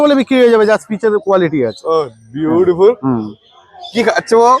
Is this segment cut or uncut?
uncut